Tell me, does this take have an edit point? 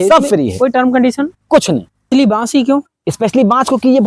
yes; 1 cut; at 2.1 s

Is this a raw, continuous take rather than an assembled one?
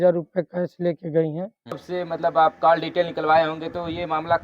no; 1 cut; at 1.8 s

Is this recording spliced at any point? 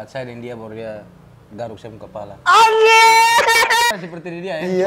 yes; 1 cut; at 3.9 s

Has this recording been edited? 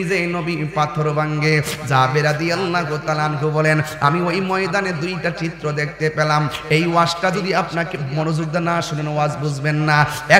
no; 0 cuts

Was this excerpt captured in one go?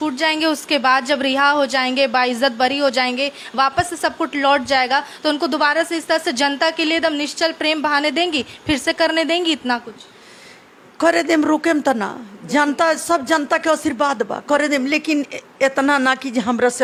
yes; 0 cuts

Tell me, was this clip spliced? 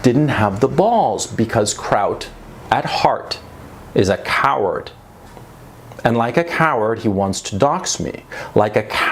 no; 0 cuts

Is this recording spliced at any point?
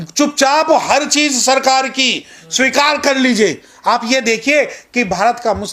no; 0 cuts

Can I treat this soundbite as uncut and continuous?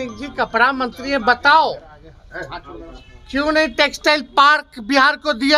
yes; 0 cuts

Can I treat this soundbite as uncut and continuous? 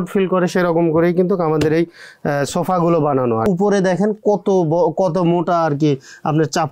no; 1 cut; at 3.4 s

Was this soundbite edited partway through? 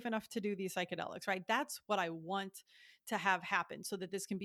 no; 0 cuts

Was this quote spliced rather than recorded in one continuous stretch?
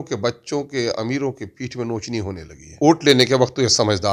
yes; 1 cut; at 2.7 s

